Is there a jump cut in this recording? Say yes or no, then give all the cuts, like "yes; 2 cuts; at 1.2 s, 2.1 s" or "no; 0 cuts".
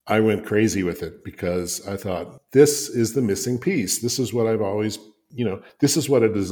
no; 0 cuts